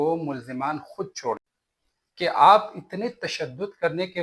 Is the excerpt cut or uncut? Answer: cut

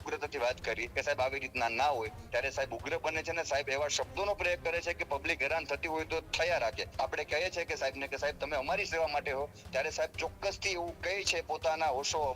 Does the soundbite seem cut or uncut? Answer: cut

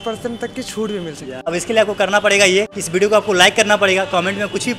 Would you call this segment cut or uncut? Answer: cut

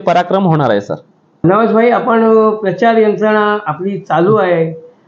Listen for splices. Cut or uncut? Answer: uncut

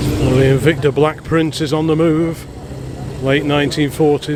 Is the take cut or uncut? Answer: uncut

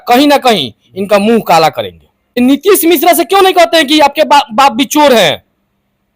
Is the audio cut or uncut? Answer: cut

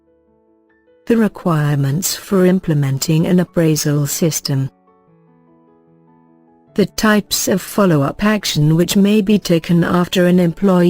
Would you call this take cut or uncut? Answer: cut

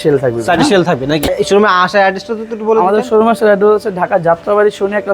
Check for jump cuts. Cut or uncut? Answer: cut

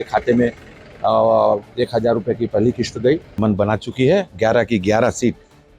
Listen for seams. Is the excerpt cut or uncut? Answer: cut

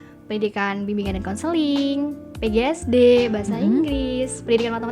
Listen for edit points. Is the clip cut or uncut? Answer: uncut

